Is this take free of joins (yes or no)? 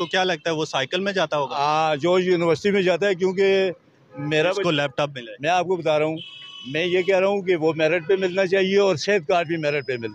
yes